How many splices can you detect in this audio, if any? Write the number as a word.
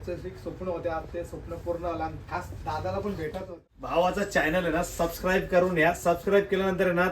one